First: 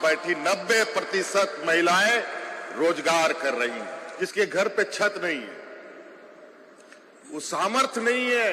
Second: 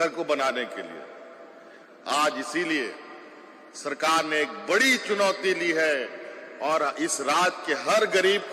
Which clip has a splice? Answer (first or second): first